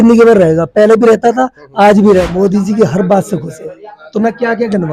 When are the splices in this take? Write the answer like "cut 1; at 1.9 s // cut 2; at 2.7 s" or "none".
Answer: cut 1; at 2.3 s